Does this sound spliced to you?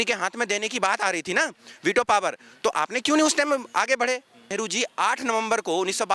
yes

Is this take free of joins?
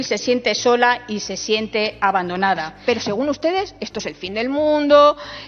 no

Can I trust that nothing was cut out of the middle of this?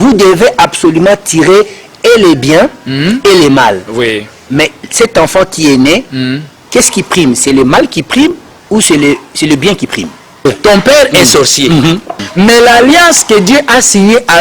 no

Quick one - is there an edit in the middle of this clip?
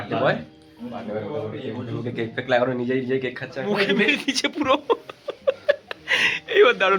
yes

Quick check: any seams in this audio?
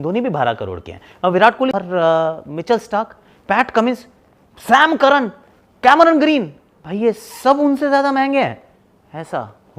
yes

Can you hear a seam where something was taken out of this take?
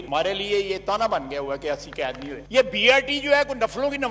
yes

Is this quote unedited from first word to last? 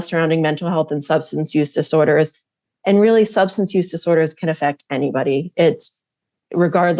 yes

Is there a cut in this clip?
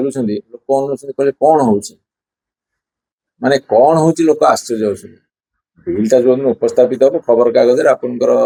no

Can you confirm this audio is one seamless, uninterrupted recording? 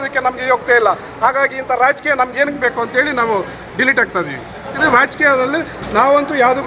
no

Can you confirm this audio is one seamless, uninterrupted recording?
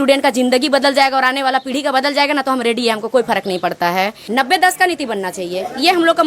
no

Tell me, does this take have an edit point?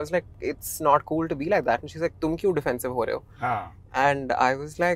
no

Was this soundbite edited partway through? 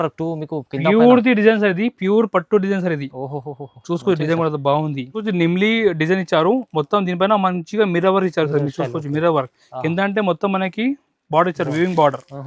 yes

